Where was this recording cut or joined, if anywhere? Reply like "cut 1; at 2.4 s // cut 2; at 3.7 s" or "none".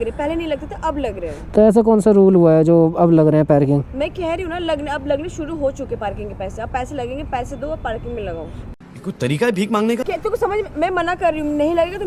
cut 1; at 8.6 s // cut 2; at 10.1 s